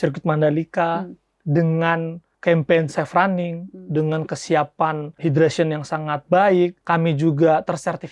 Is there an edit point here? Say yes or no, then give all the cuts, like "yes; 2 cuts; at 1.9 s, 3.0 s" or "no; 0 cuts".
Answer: yes; 3 cuts; at 2.2 s, 5.1 s, 6.8 s